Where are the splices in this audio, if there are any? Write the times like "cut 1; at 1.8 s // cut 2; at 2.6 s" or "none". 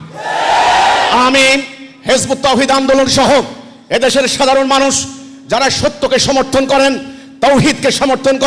none